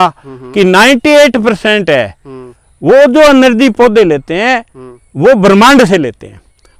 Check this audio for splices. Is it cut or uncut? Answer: uncut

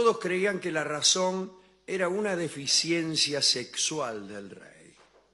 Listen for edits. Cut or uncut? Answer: cut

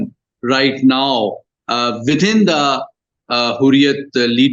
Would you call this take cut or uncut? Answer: uncut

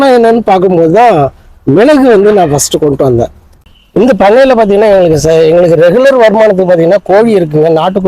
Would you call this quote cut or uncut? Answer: cut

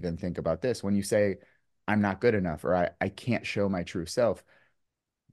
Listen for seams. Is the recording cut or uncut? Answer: uncut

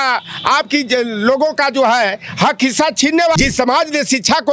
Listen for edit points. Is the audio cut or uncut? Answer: cut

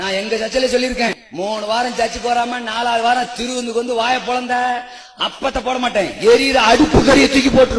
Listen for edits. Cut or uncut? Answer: cut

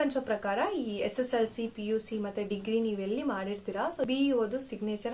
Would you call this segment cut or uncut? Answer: cut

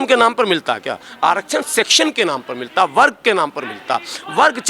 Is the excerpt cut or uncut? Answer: uncut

